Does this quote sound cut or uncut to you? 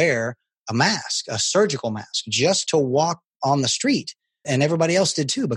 cut